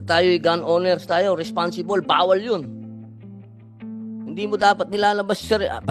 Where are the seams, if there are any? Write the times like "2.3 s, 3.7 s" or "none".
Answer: 3.2 s, 4.3 s